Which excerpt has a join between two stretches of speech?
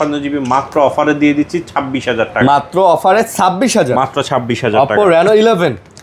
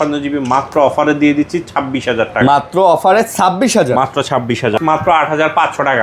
second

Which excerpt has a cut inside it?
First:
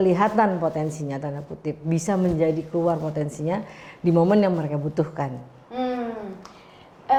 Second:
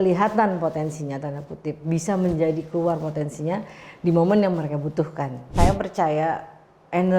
second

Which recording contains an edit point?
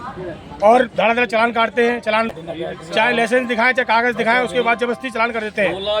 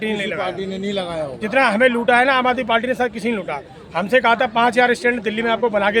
first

